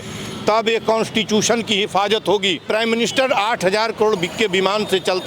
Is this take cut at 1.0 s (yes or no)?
no